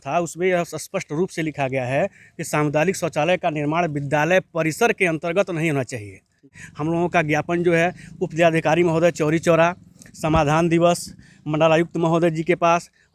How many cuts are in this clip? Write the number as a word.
one